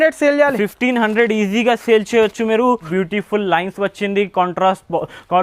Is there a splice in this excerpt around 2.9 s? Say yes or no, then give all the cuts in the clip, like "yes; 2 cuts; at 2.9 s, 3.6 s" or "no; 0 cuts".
yes; 1 cut; at 2.9 s